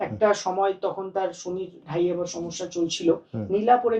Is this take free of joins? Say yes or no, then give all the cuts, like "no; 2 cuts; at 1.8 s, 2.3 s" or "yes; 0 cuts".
yes; 0 cuts